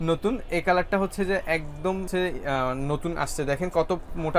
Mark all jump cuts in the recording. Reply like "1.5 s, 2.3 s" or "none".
none